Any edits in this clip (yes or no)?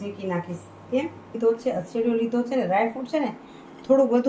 yes